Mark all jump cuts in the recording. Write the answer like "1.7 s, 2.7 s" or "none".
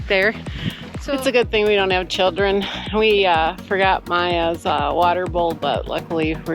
0.9 s

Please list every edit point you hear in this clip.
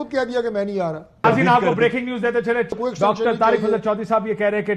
1.2 s, 2.8 s

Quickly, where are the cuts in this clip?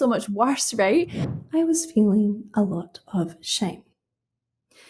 1.2 s

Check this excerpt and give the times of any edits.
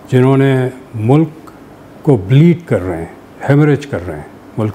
none

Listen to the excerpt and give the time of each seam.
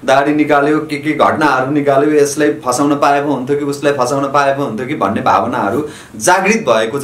none

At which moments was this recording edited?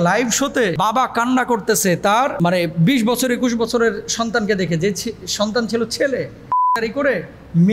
0.8 s, 2.3 s, 6.7 s

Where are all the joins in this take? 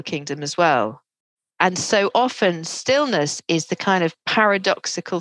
none

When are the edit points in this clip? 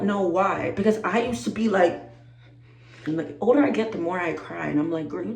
3.0 s

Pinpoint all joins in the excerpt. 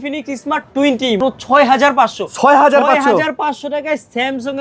1.2 s

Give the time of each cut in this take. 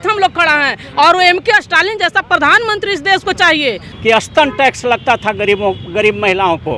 3.9 s

